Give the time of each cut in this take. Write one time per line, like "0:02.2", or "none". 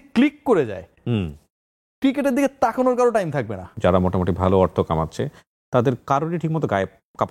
0:03.7